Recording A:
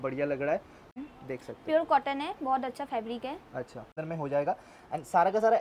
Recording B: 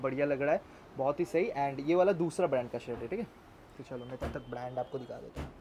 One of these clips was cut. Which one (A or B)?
A